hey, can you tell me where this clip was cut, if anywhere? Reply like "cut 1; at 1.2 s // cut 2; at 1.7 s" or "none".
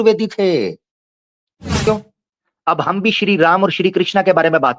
cut 1; at 1.9 s